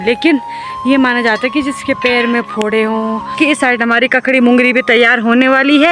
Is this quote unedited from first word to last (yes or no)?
no